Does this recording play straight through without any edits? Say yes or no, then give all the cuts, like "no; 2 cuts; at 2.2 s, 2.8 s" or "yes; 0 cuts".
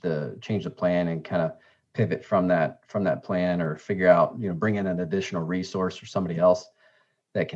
yes; 0 cuts